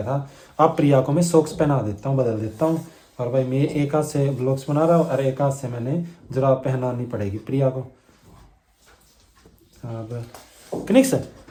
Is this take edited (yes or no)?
no